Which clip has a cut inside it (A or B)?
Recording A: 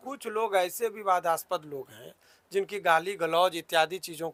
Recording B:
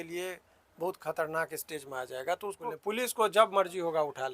B